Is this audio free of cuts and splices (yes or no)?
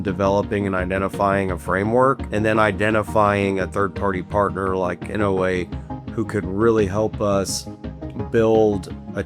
no